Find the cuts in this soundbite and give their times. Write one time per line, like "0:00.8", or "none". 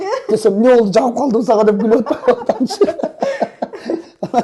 none